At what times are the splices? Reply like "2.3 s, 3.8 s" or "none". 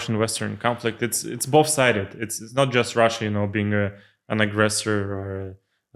none